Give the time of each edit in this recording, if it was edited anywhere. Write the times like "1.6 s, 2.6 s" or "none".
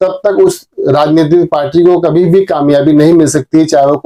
none